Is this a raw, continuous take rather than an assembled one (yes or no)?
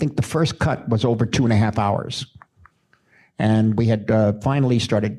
yes